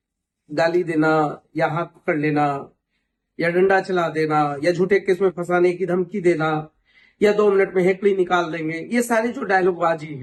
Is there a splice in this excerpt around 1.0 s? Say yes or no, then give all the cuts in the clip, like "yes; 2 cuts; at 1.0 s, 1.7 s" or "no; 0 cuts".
no; 0 cuts